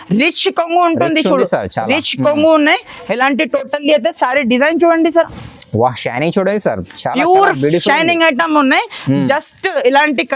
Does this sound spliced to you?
no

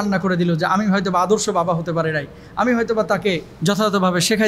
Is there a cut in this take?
no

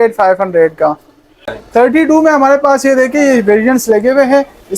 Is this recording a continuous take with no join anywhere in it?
yes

